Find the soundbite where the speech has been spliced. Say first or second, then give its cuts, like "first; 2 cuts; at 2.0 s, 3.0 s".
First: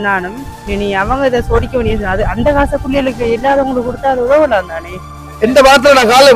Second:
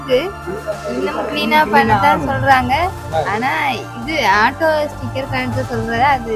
first; 1 cut; at 5.3 s